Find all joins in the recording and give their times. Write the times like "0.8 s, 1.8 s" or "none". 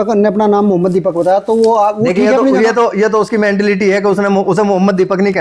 none